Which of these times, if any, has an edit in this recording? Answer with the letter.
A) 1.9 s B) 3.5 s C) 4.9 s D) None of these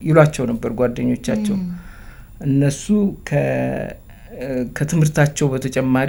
D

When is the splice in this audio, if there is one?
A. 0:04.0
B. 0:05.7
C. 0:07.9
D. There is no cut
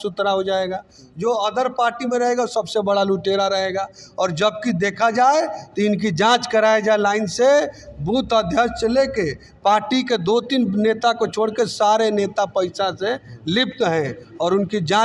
D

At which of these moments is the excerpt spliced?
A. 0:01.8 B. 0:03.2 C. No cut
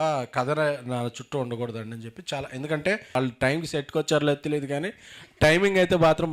B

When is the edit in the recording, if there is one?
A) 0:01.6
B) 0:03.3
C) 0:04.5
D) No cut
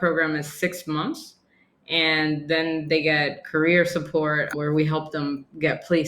C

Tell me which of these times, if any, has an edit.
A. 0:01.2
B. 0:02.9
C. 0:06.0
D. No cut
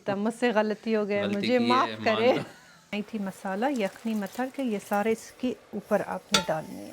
B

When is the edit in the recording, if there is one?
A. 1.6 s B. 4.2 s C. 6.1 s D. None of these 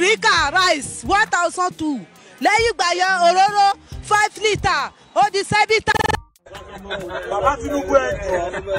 C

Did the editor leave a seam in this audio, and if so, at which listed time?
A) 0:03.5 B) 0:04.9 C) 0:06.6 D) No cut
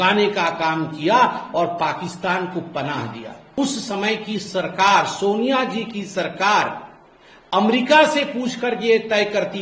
A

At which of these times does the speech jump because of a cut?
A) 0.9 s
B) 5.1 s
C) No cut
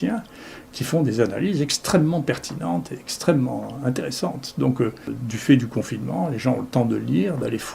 B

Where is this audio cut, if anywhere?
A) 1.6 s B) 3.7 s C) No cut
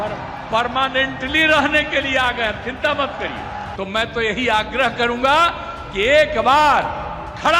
B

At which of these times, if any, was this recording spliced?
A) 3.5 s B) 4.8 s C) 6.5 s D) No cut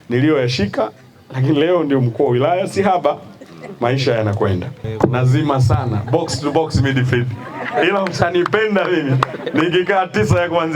B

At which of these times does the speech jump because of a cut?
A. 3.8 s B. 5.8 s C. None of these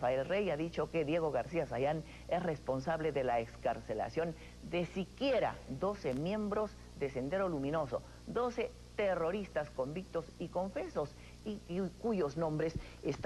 B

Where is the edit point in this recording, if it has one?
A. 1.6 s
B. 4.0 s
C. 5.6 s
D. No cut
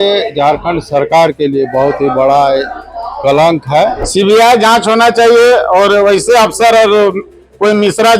B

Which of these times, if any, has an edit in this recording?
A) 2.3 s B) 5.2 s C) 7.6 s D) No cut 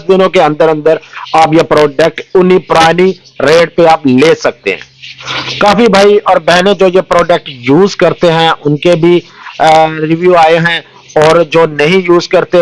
B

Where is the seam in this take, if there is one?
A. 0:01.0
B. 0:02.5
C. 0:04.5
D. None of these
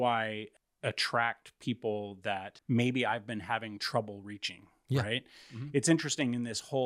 B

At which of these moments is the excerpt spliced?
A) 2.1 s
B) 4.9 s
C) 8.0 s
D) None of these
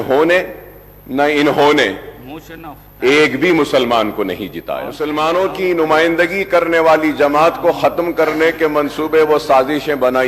B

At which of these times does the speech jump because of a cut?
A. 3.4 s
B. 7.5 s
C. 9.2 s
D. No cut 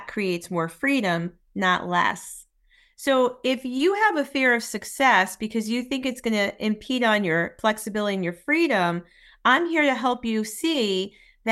B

